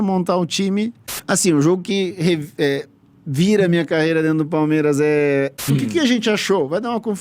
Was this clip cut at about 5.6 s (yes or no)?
yes